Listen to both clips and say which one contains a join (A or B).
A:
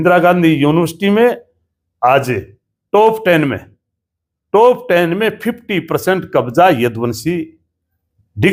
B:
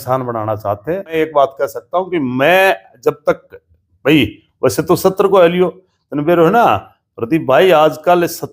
B